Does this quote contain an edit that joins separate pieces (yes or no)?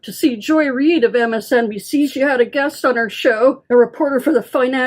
yes